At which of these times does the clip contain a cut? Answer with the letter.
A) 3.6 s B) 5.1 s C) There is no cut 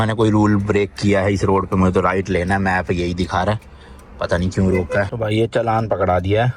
B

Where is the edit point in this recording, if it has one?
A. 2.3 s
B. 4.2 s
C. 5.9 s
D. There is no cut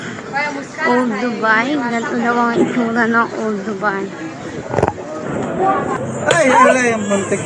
C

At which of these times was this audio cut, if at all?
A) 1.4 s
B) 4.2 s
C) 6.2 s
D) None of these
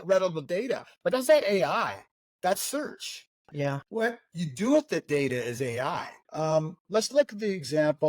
C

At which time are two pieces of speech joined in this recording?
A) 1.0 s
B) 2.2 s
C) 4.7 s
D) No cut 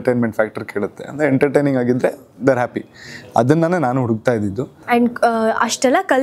C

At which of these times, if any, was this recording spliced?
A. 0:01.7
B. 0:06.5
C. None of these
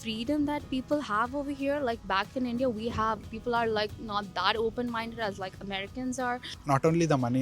B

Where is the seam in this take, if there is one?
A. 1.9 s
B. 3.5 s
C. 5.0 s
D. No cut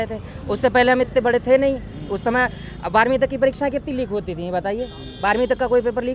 D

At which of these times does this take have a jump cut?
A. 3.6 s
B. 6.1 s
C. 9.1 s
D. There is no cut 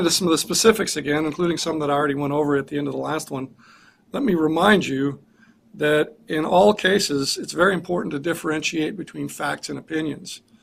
D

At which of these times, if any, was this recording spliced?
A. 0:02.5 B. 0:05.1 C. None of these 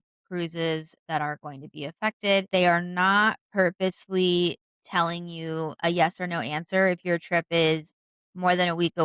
A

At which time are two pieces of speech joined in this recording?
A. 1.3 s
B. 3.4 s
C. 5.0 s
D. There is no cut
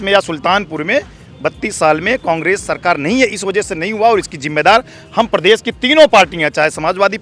D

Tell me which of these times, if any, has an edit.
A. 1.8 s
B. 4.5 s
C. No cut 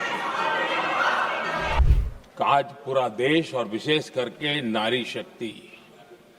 A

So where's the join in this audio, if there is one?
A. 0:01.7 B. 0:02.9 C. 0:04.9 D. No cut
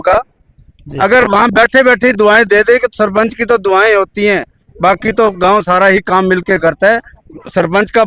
D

